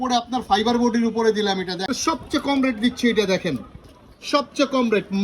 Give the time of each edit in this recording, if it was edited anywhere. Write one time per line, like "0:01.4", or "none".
0:01.9